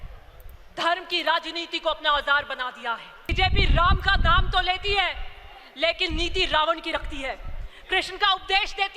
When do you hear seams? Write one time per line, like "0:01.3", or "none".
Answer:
0:03.3